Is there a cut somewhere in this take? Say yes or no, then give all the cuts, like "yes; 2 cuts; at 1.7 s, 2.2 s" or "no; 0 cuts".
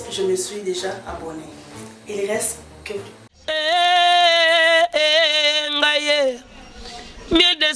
yes; 1 cut; at 3.2 s